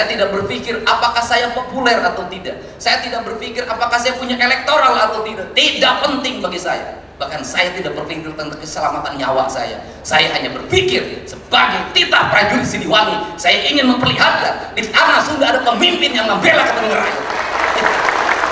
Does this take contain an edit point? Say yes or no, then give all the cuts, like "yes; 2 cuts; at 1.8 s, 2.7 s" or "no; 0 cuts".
no; 0 cuts